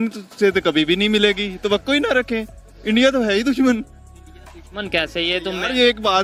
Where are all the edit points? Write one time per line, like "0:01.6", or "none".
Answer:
none